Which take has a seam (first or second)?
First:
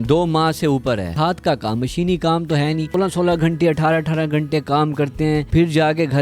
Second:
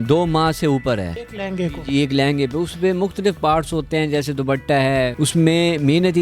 first